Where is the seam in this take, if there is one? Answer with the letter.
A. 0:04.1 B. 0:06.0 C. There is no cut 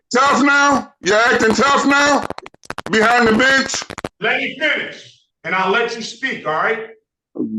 A